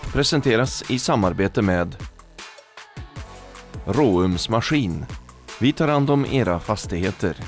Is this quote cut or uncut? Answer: uncut